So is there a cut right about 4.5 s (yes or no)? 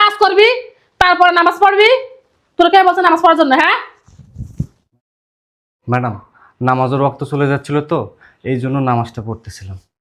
no